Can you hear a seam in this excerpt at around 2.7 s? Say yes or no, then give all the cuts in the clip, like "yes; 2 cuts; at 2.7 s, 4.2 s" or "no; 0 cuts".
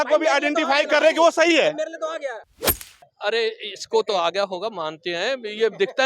yes; 1 cut; at 2.7 s